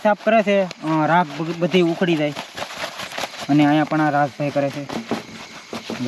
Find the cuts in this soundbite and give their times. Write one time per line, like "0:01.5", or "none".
none